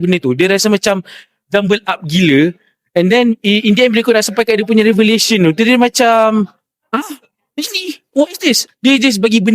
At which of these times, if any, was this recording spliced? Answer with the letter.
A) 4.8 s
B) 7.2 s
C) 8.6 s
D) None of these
C